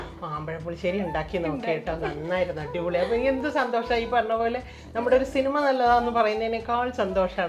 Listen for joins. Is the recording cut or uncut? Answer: uncut